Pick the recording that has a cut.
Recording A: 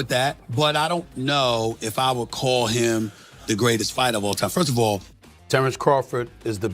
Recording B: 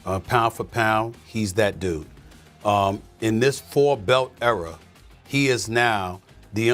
A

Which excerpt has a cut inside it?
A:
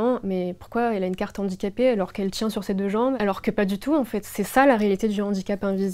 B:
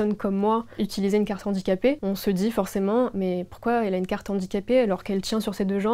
B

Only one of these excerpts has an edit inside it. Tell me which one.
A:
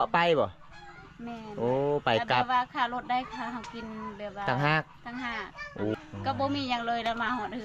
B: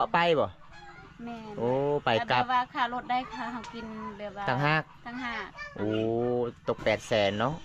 A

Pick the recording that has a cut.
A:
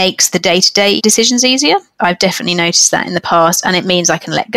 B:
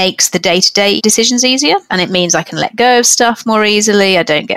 B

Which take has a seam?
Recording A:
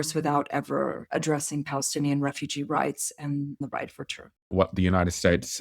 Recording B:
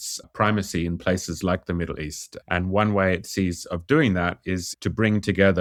A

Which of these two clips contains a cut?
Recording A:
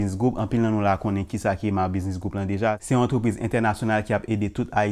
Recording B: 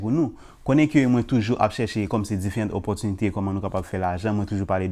A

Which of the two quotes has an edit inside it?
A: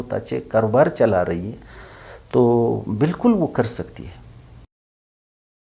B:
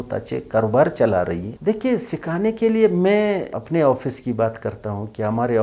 B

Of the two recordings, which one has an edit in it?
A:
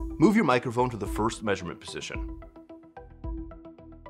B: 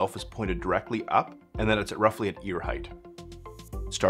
A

